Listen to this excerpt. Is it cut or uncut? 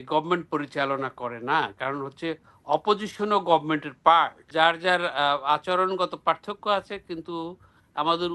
cut